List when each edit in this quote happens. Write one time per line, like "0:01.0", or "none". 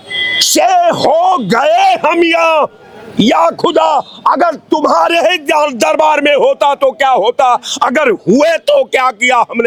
none